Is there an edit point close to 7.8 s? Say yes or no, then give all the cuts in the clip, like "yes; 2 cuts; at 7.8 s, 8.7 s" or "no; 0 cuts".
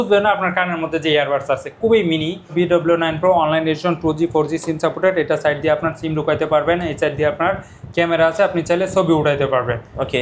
no; 1 cut; at 2.5 s